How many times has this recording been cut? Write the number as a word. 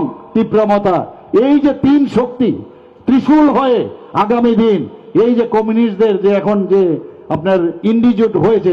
zero